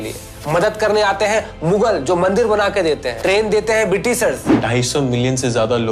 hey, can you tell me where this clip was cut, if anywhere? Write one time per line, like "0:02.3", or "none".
0:03.1
0:04.6

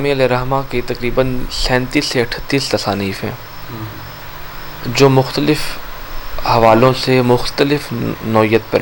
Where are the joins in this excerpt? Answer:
none

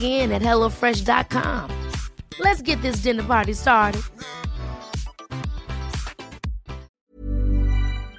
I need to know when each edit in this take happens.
0:07.0

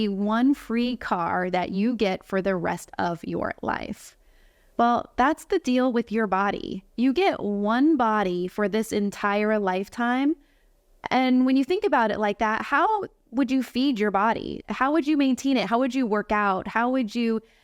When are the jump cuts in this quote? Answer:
0:14.6

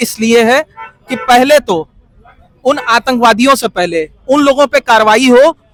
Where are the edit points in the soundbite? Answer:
none

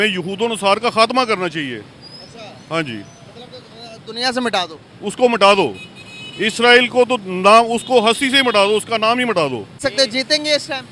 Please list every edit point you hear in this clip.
0:09.8

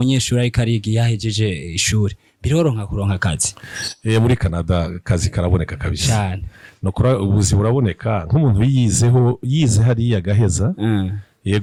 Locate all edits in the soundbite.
none

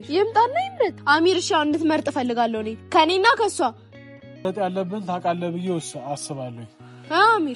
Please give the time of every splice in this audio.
0:01.0
0:04.4

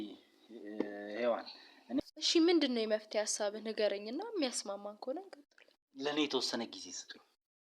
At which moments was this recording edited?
0:02.0

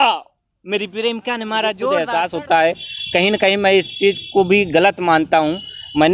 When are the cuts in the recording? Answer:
0:01.8

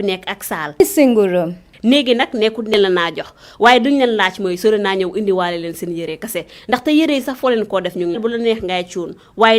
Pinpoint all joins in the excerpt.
0:08.2

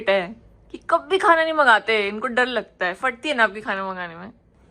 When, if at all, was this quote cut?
none

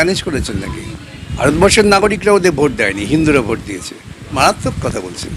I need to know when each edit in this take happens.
0:01.2
0:04.4

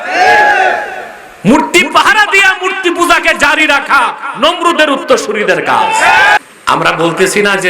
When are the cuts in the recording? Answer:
0:06.4

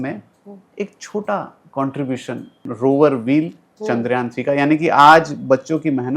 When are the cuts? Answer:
0:02.7

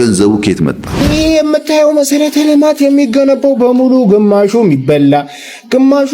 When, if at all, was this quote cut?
0:01.0

